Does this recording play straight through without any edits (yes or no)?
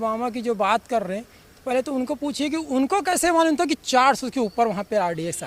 yes